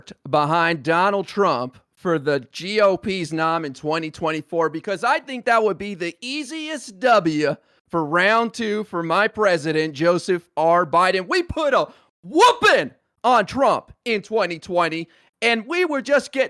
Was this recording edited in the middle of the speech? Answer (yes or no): no